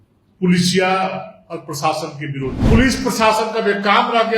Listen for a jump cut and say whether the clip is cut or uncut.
cut